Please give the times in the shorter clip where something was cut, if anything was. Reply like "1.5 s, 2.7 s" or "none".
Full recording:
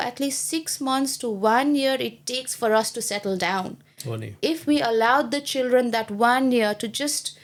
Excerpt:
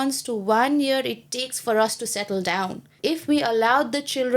2.9 s